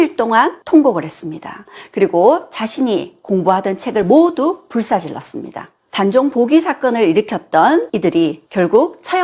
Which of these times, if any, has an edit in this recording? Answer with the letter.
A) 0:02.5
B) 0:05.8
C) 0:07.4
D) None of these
B